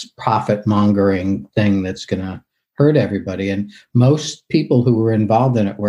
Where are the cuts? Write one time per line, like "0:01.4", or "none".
none